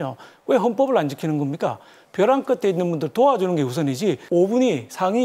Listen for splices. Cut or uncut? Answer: cut